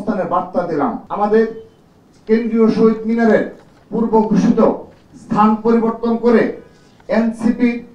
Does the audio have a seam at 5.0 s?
no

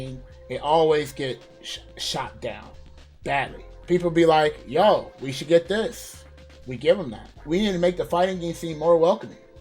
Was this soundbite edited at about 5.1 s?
no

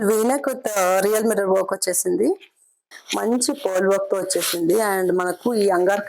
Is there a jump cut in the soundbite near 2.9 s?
yes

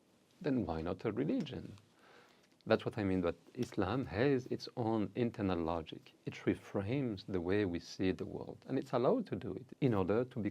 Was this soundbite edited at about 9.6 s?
yes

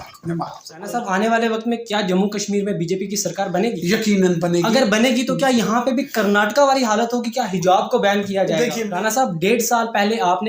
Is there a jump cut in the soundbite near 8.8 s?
yes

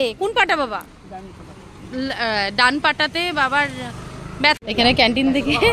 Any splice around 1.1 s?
no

